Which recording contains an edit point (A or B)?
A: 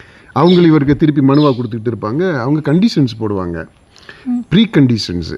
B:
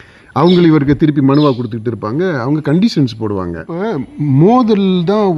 B